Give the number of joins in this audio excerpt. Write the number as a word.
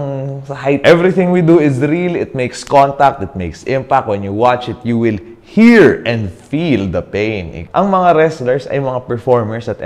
two